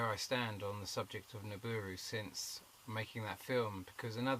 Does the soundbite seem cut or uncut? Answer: cut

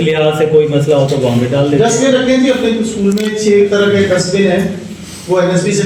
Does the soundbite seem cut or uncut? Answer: uncut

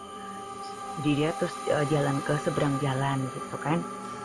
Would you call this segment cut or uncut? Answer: cut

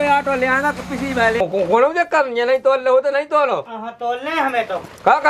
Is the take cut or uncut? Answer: cut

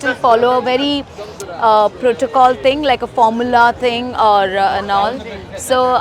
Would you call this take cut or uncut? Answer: uncut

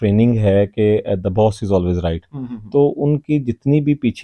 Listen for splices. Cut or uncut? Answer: uncut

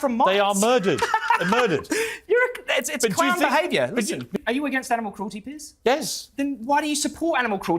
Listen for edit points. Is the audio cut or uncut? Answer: cut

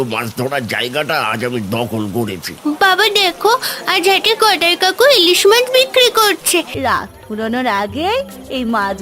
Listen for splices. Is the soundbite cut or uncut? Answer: cut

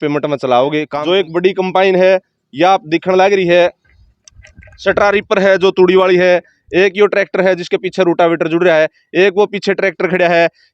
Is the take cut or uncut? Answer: cut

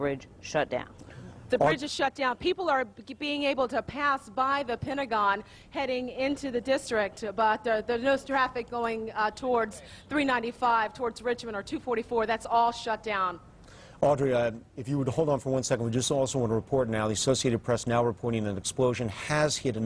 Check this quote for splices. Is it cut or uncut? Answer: uncut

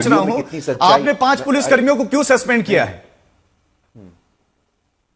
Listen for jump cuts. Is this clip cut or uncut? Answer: uncut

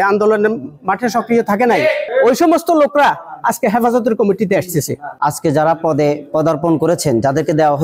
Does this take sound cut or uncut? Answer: cut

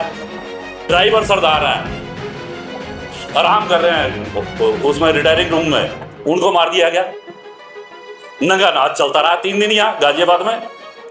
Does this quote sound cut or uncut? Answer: uncut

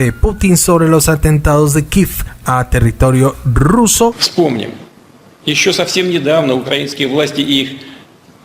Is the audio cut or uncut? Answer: cut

